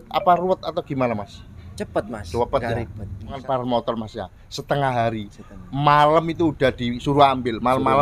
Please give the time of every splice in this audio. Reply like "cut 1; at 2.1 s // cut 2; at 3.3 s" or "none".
cut 1; at 3.4 s